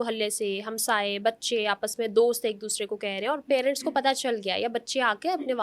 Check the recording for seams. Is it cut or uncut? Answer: uncut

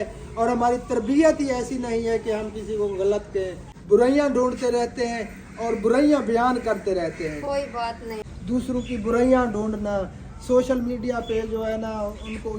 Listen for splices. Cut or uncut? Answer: cut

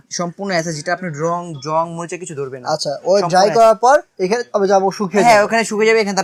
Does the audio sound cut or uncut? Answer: uncut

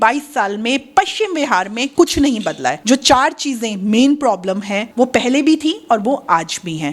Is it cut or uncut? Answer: uncut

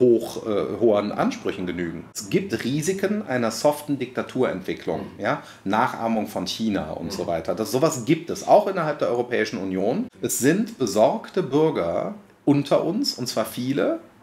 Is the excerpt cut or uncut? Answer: cut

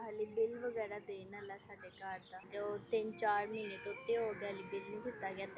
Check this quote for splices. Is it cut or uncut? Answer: cut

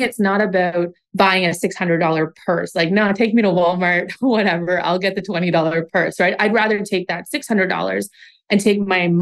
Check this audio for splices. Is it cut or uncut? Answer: cut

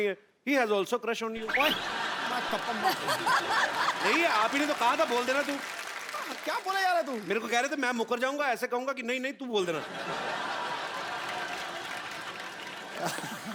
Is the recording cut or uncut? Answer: uncut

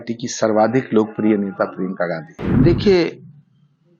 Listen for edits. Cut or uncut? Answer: cut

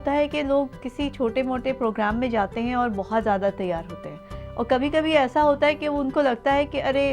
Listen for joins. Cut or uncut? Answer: uncut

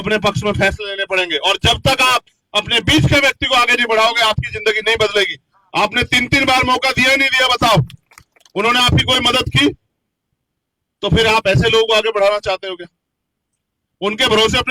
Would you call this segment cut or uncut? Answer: uncut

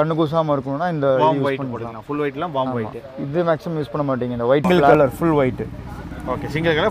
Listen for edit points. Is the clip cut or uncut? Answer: cut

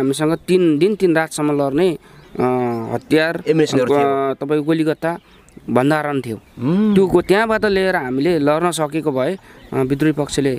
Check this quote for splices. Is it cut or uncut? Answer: uncut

